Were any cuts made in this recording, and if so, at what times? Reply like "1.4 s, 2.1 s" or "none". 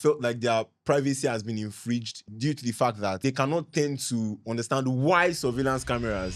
2.2 s, 3.2 s

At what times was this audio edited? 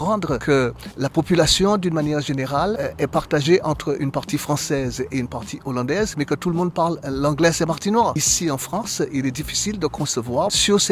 none

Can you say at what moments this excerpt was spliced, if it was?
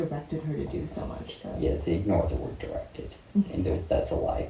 none

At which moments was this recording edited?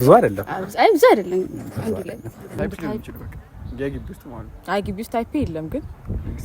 2.6 s

